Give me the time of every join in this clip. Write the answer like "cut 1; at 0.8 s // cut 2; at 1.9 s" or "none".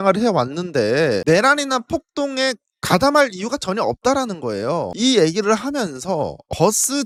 none